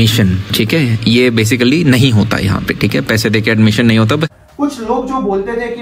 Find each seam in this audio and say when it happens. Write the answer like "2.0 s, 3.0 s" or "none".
4.4 s